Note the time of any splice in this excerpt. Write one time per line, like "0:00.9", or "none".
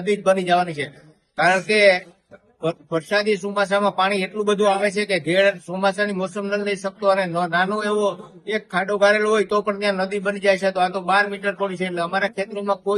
none